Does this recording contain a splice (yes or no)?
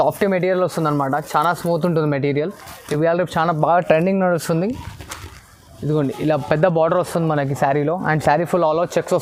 no